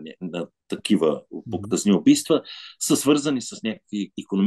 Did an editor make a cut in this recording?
no; 0 cuts

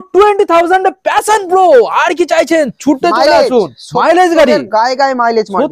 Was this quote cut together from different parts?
no; 0 cuts

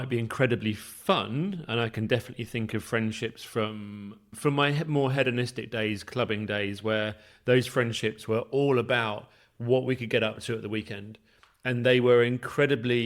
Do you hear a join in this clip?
no; 0 cuts

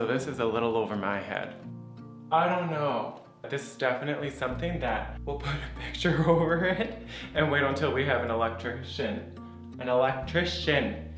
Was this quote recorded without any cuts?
yes; 0 cuts

